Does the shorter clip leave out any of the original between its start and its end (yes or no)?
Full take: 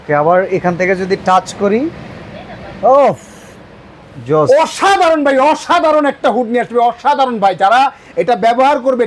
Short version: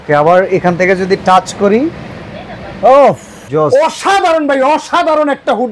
yes